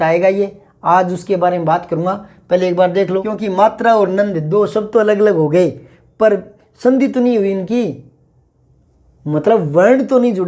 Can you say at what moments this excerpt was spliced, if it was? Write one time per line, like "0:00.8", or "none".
0:03.3